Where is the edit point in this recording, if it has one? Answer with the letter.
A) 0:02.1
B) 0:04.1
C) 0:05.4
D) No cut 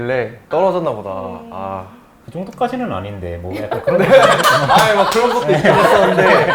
D